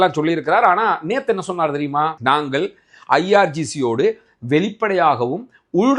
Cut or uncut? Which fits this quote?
uncut